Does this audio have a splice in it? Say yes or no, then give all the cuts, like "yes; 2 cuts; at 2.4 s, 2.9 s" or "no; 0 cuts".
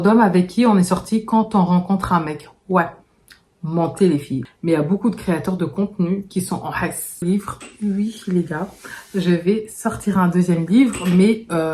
yes; 2 cuts; at 4.5 s, 7.2 s